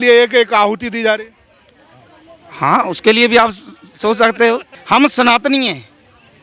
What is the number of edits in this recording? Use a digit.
1